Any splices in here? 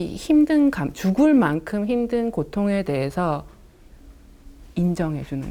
no; 0 cuts

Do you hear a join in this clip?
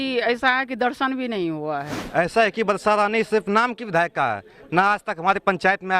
yes; 1 cut; at 1.9 s

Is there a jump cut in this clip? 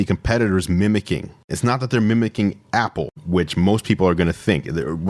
yes; 1 cut; at 1.5 s

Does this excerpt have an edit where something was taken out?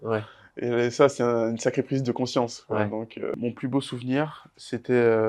yes; 1 cut; at 3.4 s

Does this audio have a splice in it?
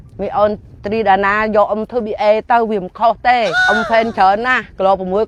no; 0 cuts

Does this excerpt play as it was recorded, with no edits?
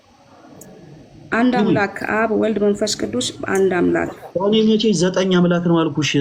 yes; 0 cuts

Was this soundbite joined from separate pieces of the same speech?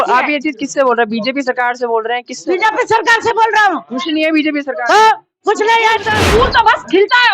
yes; 1 cut; at 6.2 s

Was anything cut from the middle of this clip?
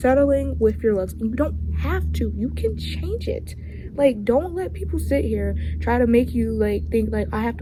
no; 0 cuts

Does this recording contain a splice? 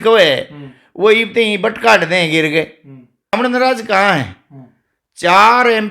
yes; 1 cut; at 3.3 s

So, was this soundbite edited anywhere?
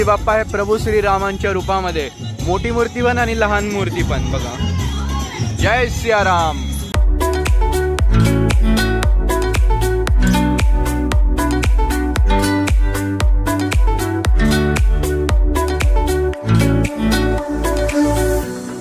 no; 0 cuts

